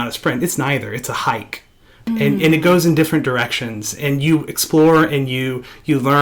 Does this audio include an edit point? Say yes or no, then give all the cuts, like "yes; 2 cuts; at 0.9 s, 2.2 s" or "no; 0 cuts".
yes; 1 cut; at 2.1 s